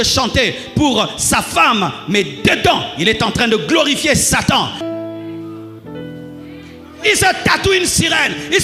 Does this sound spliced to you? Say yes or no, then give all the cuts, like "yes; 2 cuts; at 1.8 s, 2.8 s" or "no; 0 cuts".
yes; 1 cut; at 4.8 s